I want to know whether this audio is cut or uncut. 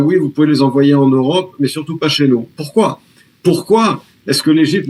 uncut